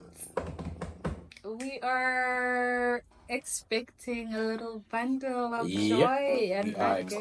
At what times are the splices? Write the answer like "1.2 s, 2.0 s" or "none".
none